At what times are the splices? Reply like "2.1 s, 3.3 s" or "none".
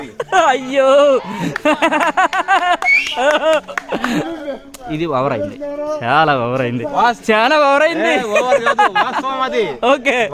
none